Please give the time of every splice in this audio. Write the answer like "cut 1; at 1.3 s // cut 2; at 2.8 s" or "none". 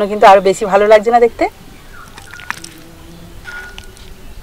none